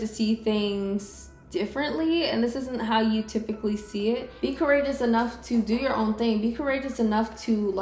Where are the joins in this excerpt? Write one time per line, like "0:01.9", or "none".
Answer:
0:04.3